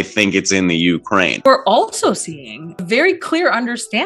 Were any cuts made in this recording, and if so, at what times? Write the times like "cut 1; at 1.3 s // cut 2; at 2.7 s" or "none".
cut 1; at 1.5 s // cut 2; at 2.8 s